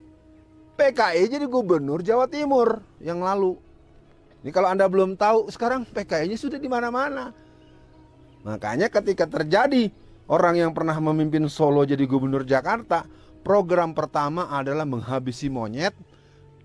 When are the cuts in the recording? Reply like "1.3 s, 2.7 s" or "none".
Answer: none